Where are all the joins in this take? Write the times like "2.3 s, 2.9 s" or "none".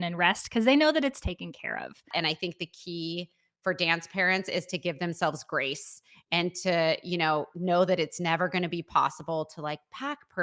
2.1 s